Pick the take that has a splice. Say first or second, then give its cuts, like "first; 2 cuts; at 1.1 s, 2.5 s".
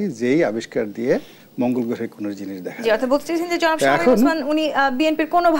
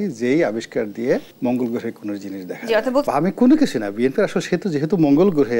second; 2 cuts; at 1.3 s, 3.1 s